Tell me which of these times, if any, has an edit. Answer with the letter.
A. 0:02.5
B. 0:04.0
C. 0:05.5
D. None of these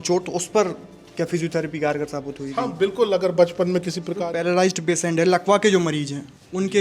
B